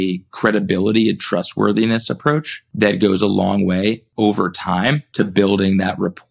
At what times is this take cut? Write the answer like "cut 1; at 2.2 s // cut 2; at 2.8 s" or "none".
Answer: cut 1; at 2.6 s // cut 2; at 4.1 s // cut 3; at 5.1 s